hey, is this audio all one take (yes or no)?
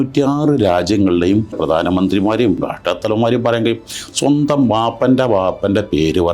no